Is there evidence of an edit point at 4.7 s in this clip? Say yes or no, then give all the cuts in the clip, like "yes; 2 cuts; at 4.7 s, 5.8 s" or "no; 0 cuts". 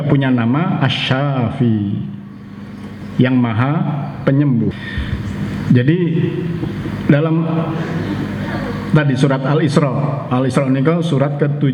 yes; 1 cut; at 4.7 s